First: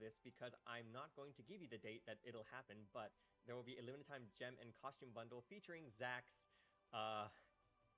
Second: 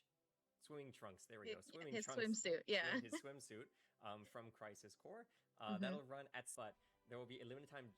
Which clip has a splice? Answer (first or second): second